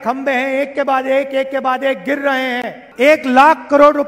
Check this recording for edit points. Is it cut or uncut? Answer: uncut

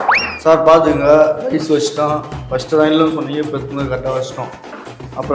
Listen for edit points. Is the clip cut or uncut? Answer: uncut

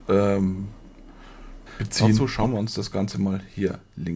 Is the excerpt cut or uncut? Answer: cut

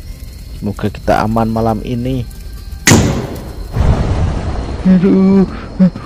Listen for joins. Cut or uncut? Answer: cut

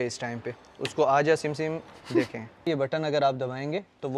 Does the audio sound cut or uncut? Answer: cut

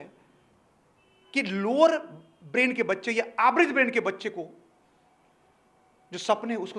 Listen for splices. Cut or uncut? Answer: uncut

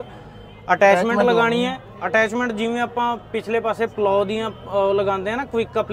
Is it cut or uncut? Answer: uncut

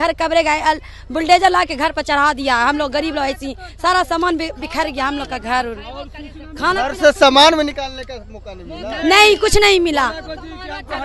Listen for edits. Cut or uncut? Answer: uncut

